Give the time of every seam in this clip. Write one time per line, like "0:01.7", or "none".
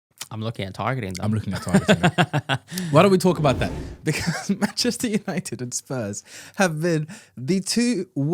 none